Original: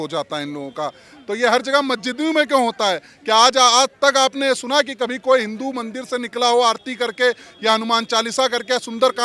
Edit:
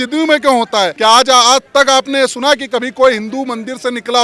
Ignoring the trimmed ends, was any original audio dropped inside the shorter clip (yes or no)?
yes